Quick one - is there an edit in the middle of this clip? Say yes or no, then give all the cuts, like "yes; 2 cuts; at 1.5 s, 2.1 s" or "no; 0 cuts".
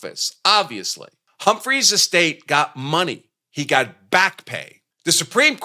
no; 0 cuts